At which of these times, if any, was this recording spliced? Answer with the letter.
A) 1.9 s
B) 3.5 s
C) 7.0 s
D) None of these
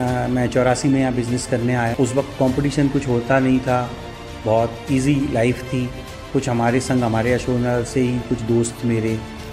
A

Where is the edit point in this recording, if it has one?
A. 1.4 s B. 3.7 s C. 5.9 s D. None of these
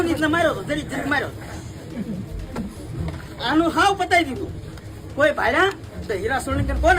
C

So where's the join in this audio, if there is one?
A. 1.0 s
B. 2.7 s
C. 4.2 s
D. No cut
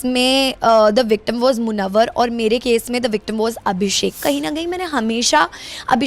C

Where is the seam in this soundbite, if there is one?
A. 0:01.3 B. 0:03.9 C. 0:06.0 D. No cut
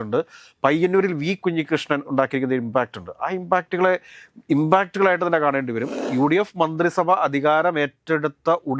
C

